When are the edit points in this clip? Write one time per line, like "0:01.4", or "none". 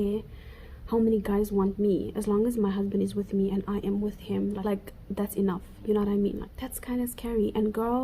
0:04.7
0:06.5

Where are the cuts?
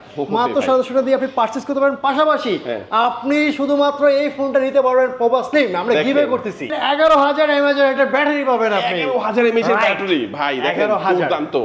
0:06.7

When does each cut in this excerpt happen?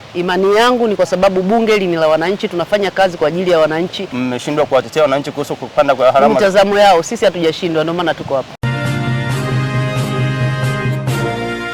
0:04.1
0:08.5

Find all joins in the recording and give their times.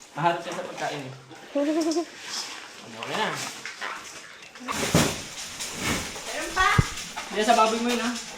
0:04.7

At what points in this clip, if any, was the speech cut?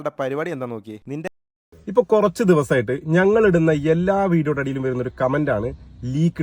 0:01.3

